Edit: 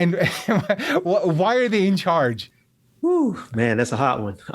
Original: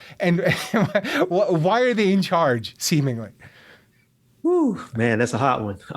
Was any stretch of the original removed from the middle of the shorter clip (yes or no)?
yes